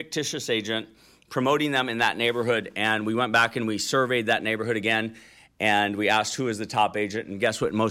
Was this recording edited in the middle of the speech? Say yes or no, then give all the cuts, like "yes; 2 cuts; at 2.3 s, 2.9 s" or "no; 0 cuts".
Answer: no; 0 cuts